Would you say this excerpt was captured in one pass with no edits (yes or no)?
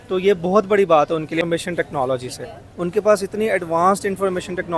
no